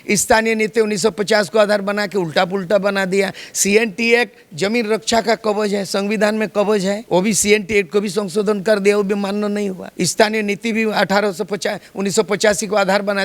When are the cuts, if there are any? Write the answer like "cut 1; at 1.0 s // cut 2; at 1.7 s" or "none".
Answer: none